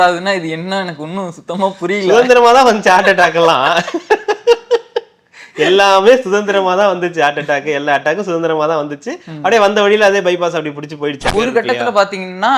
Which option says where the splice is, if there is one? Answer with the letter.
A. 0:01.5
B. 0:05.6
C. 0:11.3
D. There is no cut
C